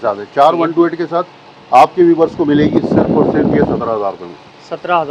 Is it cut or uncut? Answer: uncut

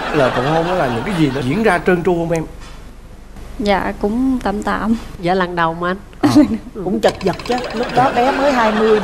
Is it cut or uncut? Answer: uncut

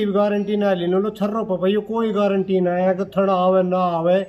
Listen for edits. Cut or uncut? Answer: uncut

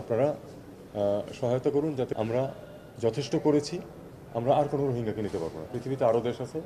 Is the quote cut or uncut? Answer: cut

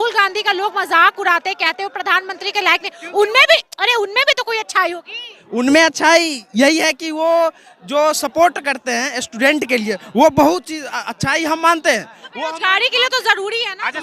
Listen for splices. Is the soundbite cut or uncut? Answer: uncut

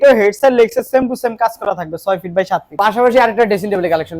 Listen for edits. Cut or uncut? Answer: cut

